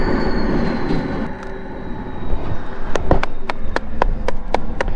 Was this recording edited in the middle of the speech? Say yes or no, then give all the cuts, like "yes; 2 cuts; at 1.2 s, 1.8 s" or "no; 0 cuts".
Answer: yes; 1 cut; at 1.3 s